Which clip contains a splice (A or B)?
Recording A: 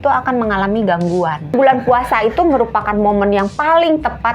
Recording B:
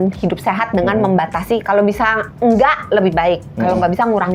A